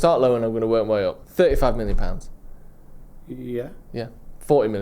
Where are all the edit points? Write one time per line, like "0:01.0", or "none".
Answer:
0:01.2